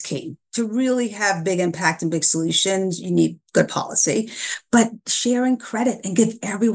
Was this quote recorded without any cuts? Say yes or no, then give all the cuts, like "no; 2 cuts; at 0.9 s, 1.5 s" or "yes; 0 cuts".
yes; 0 cuts